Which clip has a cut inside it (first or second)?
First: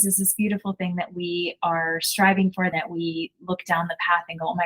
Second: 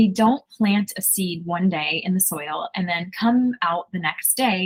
first